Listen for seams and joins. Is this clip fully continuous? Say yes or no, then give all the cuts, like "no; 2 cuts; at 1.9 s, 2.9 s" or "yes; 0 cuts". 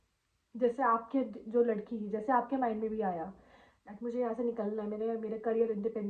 yes; 0 cuts